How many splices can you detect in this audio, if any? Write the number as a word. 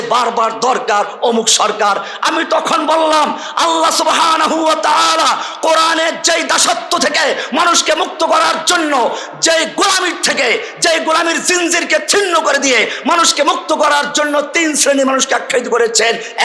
zero